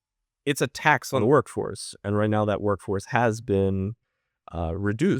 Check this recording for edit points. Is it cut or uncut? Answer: cut